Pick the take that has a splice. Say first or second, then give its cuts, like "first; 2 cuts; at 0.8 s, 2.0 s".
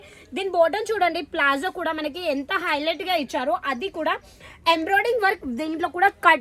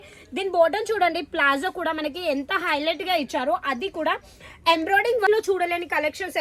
second; 1 cut; at 5.3 s